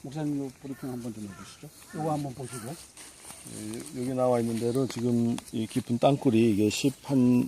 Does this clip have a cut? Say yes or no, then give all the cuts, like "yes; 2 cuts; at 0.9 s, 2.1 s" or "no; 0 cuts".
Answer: yes; 1 cut; at 2.2 s